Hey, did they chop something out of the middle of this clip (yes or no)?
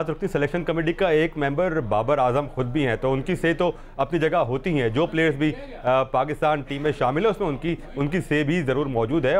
no